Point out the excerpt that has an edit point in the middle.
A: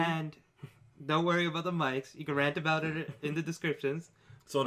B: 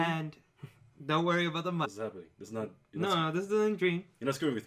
A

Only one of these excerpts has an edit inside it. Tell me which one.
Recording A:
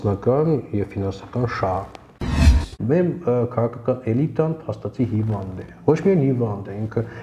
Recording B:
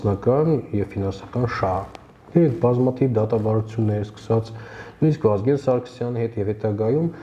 A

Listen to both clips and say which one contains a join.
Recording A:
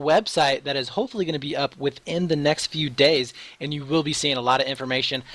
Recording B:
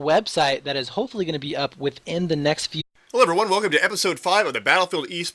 A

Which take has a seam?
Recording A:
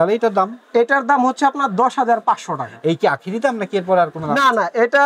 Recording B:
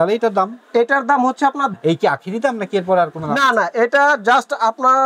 B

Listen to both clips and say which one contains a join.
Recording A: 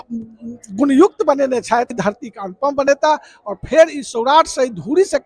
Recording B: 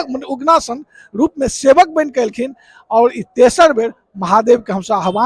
A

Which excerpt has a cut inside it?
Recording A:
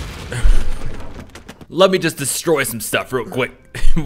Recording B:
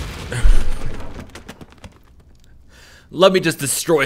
A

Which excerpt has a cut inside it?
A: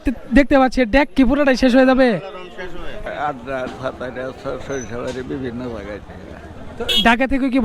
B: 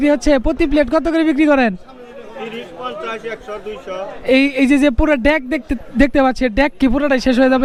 A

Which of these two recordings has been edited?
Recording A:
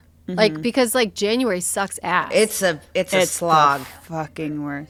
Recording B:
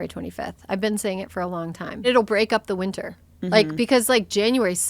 B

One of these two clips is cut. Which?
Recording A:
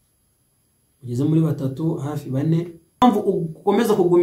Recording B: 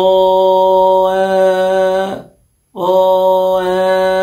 A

